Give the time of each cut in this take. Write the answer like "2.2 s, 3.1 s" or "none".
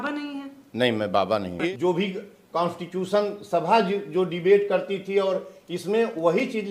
1.6 s